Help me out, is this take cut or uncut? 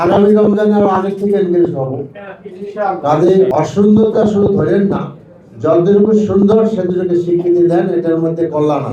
cut